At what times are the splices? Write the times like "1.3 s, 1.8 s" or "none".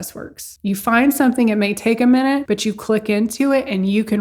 none